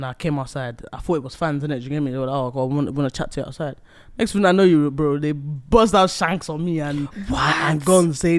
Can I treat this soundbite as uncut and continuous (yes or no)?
yes